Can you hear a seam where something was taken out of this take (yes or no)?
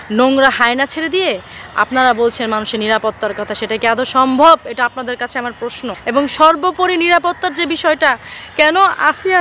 yes